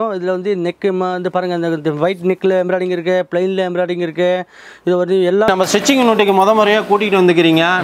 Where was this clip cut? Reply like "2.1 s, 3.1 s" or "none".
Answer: 5.5 s